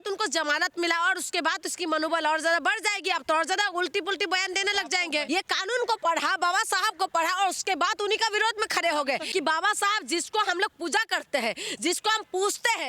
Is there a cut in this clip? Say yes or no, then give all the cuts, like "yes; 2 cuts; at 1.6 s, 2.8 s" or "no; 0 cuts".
yes; 2 cuts; at 5.2 s, 9.3 s